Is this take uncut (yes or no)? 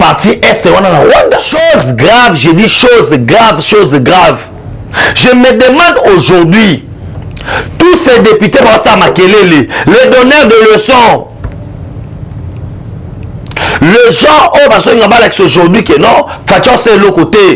no